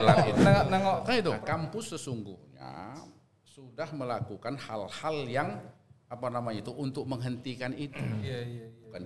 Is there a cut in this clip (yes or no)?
yes